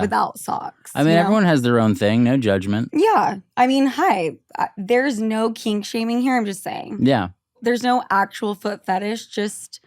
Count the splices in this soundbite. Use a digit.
1